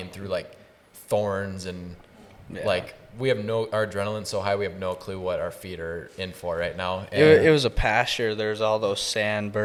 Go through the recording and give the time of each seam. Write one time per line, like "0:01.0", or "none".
none